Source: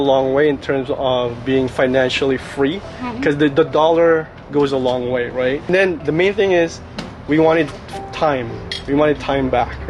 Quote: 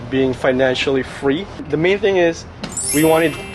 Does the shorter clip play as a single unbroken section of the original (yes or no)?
no